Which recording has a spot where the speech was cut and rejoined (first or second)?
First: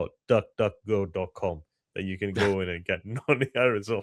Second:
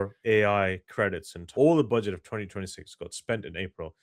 second